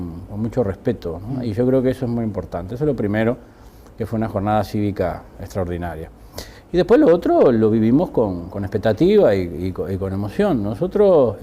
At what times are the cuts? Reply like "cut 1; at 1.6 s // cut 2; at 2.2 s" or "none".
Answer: cut 1; at 5.3 s